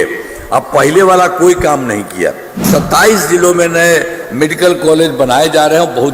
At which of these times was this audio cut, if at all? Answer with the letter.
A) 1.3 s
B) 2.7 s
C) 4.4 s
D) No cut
B